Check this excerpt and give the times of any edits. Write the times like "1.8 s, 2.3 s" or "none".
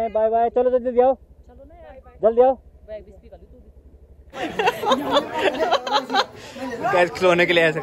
4.3 s